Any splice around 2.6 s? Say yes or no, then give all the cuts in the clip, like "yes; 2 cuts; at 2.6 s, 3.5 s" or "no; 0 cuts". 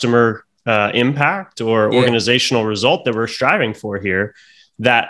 no; 0 cuts